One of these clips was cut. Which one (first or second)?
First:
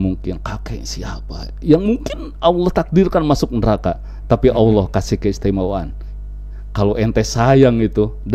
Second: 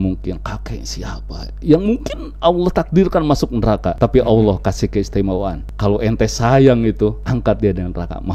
second